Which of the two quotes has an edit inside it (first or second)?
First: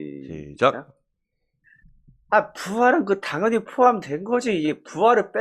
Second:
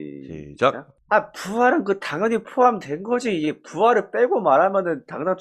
second